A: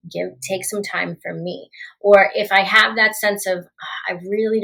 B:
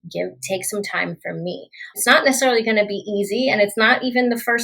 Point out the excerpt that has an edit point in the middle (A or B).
B